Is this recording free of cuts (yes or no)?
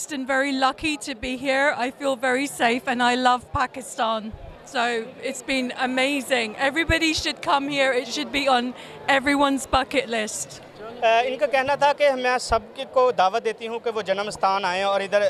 yes